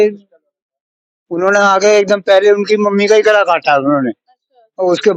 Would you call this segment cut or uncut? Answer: uncut